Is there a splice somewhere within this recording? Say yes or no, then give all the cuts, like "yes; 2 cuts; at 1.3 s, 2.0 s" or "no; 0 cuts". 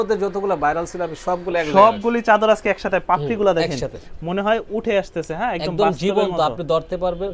no; 0 cuts